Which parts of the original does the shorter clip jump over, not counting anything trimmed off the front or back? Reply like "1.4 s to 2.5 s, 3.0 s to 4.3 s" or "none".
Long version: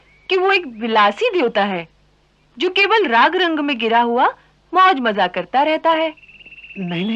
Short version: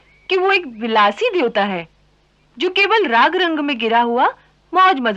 none